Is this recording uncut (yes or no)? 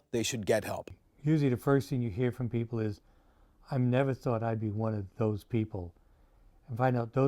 no